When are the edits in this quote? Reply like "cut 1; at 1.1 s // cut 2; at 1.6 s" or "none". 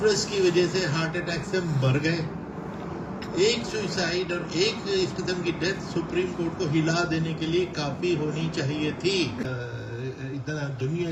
cut 1; at 9.4 s

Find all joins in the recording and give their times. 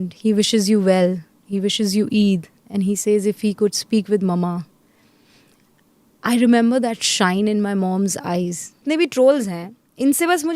cut 1; at 8.8 s

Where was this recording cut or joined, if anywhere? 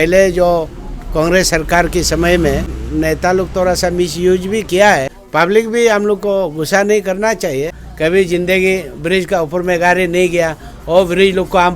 cut 1; at 2.8 s // cut 2; at 5.2 s // cut 3; at 7.8 s

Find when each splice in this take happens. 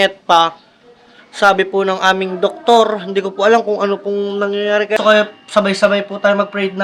cut 1; at 5.0 s

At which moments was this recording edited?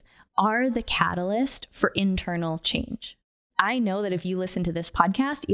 cut 1; at 3.5 s

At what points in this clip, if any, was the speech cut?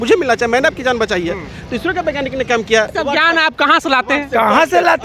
cut 1; at 2.9 s

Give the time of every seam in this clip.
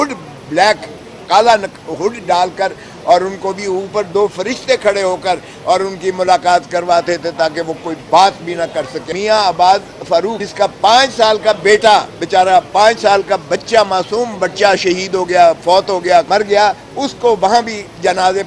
cut 1; at 9.0 s // cut 2; at 10.4 s // cut 3; at 16.3 s

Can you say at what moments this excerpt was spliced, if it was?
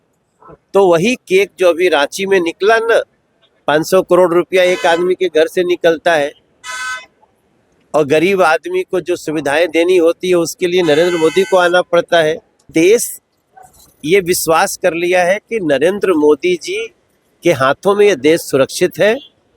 cut 1; at 12.7 s

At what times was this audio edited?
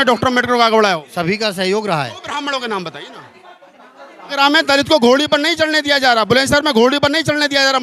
cut 1; at 4.3 s

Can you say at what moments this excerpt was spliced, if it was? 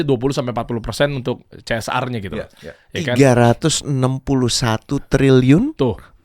none

